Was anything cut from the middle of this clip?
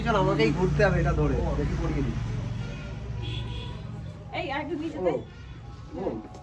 no; 0 cuts

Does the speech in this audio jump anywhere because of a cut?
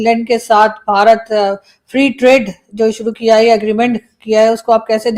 no; 0 cuts

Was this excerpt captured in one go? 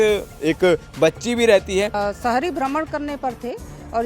no; 1 cut; at 2.0 s

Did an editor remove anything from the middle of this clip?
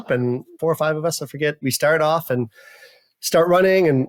no; 0 cuts

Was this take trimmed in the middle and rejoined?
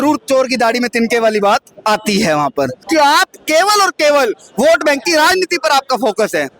yes; 1 cut; at 2.8 s

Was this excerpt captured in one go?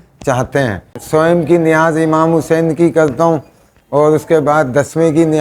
no; 1 cut; at 1.0 s

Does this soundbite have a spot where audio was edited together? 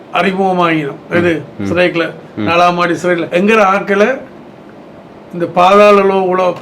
yes; 1 cut; at 3.3 s

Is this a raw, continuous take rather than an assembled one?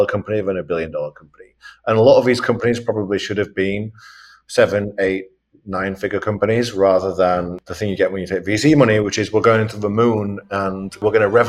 yes; 0 cuts

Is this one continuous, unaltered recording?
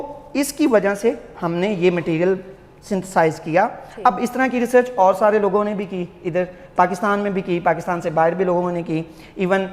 yes; 0 cuts

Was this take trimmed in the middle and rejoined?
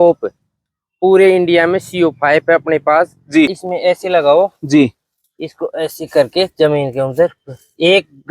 yes; 1 cut; at 3.5 s

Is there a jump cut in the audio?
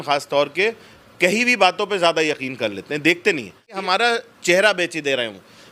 yes; 1 cut; at 3.8 s

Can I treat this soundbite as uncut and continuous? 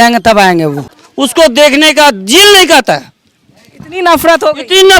no; 1 cut; at 1.0 s

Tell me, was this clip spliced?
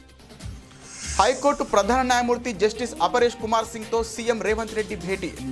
yes; 1 cut; at 1.1 s

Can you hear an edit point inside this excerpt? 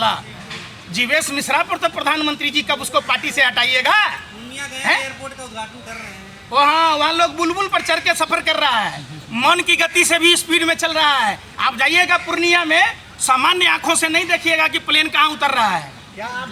no; 0 cuts

